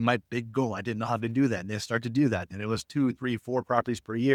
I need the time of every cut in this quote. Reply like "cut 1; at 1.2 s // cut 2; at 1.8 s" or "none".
none